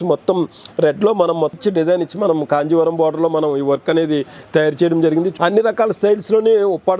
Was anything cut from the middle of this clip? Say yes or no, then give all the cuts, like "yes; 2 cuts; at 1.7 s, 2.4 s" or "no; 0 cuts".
yes; 2 cuts; at 1.6 s, 5.3 s